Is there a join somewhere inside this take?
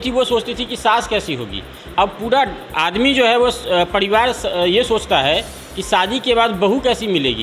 no; 0 cuts

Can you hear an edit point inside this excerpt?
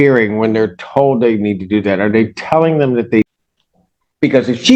yes; 1 cut; at 3.2 s

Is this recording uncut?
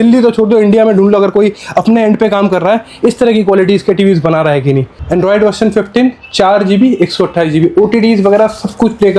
no; 1 cut; at 4.9 s

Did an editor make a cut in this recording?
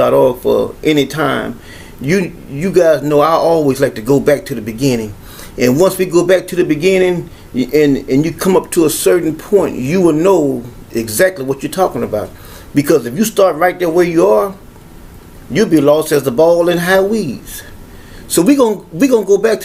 no; 0 cuts

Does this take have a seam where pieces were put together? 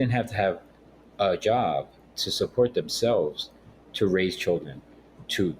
yes; 2 cuts; at 2.1 s, 3.8 s

